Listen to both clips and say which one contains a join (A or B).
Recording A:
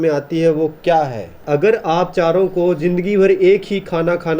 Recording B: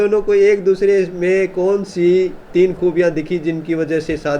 A